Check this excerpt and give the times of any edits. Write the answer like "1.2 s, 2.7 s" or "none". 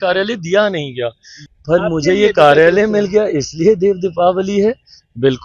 1.4 s